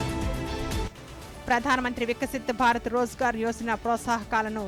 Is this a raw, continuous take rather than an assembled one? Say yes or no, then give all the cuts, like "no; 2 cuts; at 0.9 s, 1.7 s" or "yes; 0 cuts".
yes; 0 cuts